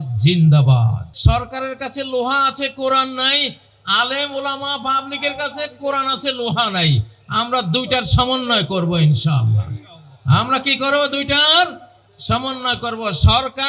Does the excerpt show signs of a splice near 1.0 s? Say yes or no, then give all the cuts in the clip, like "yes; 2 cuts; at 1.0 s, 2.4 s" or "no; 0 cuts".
yes; 1 cut; at 1.0 s